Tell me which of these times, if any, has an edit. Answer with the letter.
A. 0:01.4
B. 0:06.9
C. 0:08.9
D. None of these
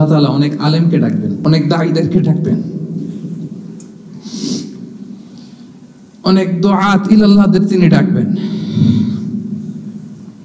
A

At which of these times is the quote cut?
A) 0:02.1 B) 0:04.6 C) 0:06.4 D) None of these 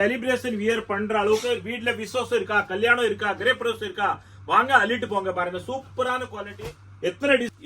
C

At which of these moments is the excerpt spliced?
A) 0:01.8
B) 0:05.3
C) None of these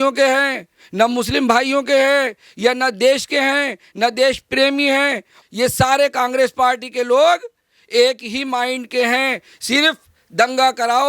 B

